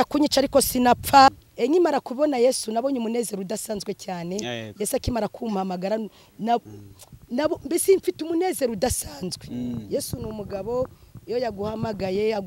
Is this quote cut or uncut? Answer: cut